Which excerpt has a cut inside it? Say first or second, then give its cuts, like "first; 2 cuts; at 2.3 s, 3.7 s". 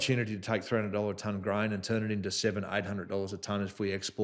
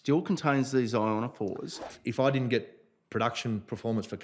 second; 1 cut; at 2.0 s